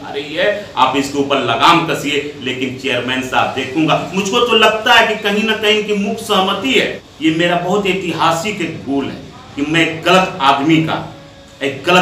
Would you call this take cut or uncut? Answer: cut